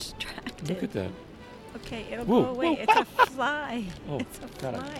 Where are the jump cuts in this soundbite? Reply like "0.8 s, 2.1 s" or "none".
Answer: none